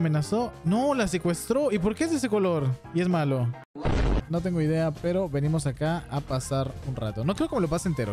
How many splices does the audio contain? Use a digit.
1